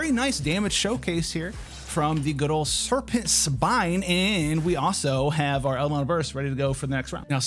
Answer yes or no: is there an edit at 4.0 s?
no